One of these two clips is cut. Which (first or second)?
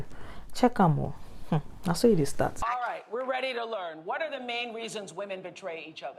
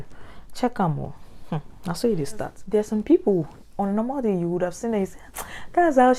first